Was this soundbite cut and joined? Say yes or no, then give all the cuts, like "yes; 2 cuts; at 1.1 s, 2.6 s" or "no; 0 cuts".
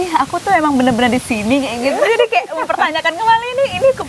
no; 0 cuts